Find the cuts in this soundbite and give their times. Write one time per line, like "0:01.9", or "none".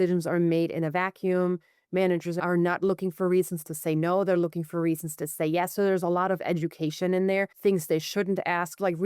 0:02.4
0:07.5